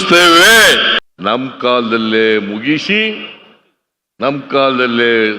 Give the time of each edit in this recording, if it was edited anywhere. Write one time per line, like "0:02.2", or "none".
0:01.0